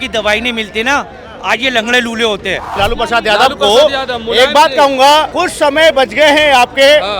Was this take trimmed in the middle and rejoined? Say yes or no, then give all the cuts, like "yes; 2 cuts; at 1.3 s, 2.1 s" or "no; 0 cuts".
yes; 2 cuts; at 2.7 s, 5.3 s